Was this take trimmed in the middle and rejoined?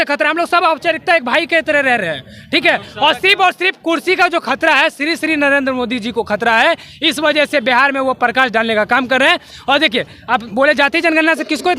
no; 0 cuts

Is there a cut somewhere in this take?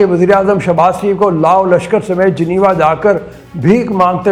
no; 0 cuts

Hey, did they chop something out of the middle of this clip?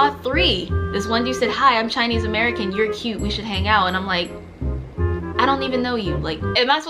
no; 0 cuts

